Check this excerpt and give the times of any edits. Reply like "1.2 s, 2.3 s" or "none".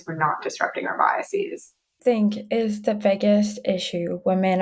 1.9 s